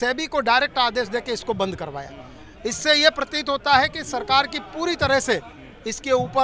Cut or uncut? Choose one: uncut